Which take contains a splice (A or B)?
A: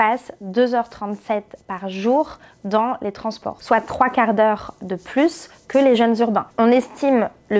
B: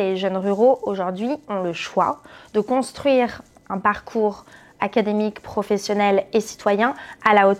A